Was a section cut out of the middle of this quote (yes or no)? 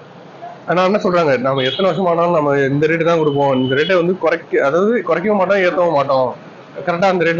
no